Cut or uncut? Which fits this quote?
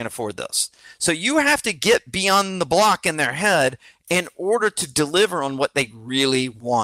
uncut